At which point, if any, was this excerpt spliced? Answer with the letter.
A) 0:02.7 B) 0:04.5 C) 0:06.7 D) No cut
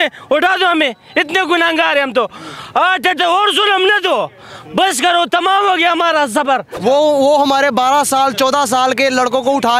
C